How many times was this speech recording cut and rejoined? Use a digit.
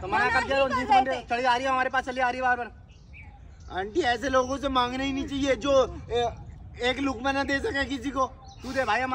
0